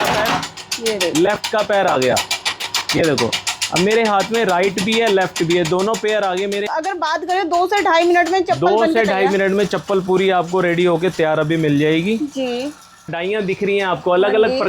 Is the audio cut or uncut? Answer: cut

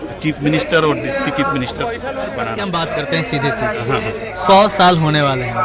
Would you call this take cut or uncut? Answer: cut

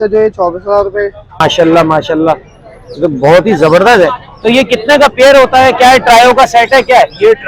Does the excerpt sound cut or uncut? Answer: cut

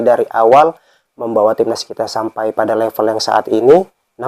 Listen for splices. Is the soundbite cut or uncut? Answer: uncut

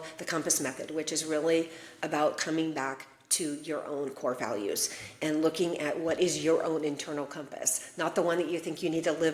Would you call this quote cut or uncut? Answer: uncut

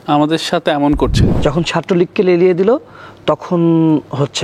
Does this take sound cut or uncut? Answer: cut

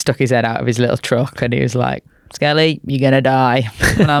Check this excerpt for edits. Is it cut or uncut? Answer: uncut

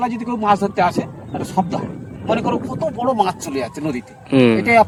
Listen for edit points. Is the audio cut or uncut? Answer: uncut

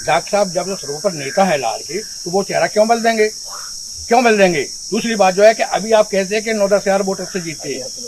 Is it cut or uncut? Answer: uncut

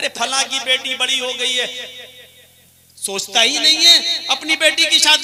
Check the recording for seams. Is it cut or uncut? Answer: uncut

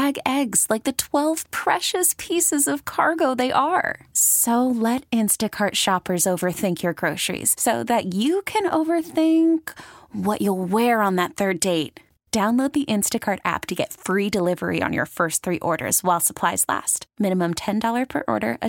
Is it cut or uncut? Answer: uncut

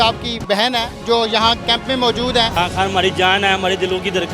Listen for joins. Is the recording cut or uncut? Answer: cut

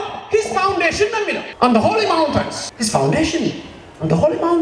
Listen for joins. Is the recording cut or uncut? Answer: cut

